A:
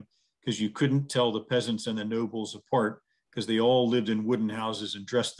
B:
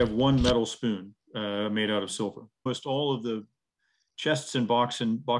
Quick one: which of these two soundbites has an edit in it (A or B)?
B